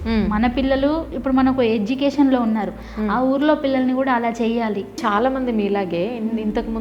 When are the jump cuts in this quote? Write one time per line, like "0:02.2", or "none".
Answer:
0:05.0